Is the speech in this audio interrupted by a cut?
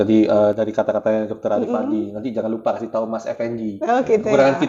no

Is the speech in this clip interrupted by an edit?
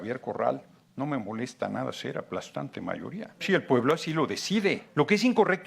yes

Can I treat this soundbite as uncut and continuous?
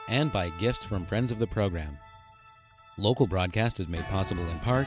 yes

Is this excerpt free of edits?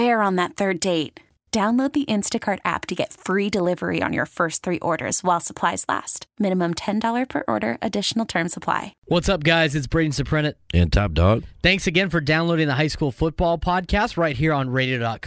no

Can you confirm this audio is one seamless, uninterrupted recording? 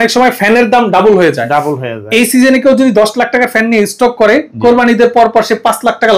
yes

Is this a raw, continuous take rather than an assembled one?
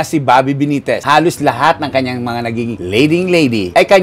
yes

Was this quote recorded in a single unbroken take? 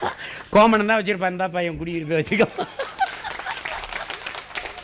yes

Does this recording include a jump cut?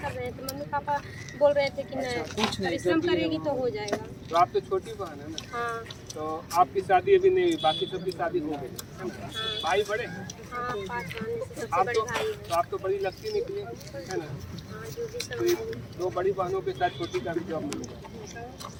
no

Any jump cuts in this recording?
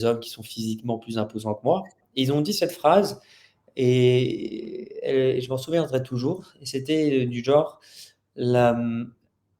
yes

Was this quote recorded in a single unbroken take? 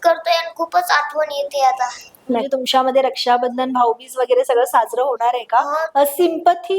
no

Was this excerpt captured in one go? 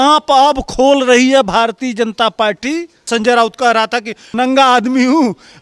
no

